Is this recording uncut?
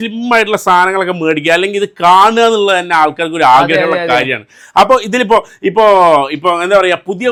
yes; 0 cuts

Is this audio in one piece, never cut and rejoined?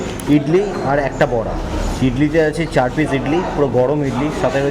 yes; 0 cuts

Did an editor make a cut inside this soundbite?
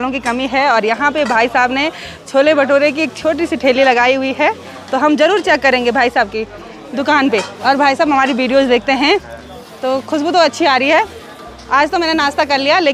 no; 0 cuts

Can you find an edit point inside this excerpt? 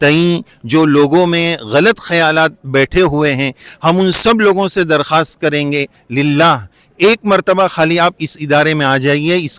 no; 0 cuts

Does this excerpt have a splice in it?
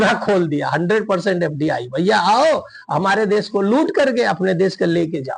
no; 0 cuts

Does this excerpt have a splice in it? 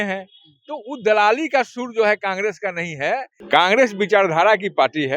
yes; 1 cut; at 3.3 s

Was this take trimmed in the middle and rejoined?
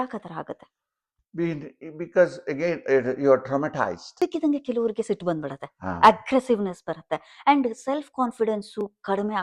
yes; 1 cut; at 4.1 s

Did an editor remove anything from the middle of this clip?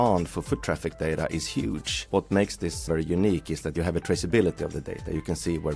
yes; 2 cuts; at 2.1 s, 2.8 s

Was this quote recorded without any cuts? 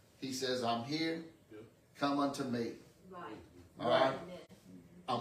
yes; 0 cuts

